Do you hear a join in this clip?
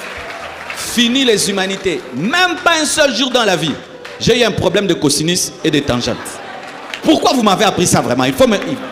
no; 0 cuts

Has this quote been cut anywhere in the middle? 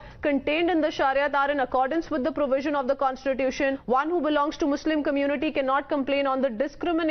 yes; 1 cut; at 3.8 s

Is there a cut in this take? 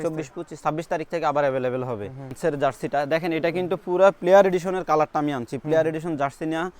yes; 1 cut; at 2.3 s

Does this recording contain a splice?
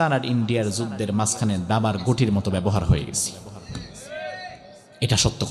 no; 0 cuts

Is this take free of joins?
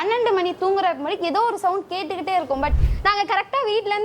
no; 1 cut; at 2.7 s

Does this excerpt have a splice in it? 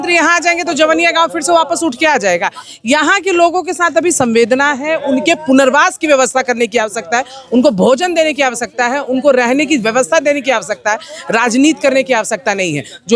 no; 0 cuts

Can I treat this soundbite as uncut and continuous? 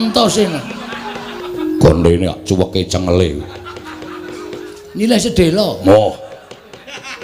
no; 1 cut; at 1.4 s

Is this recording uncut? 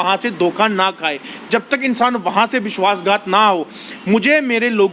yes; 0 cuts

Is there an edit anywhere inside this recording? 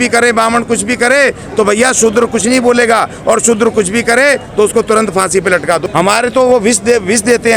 yes; 1 cut; at 5.8 s

